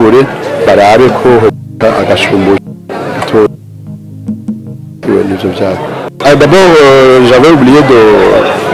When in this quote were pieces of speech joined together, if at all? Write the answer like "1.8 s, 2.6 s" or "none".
6.1 s